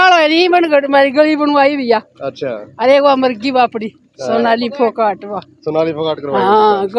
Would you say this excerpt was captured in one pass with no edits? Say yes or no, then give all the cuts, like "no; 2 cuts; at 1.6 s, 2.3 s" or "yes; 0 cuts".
yes; 0 cuts